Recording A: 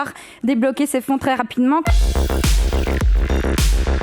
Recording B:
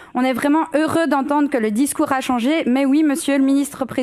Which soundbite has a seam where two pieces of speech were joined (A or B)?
A